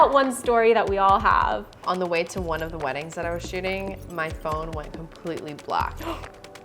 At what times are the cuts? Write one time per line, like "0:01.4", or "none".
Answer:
0:01.8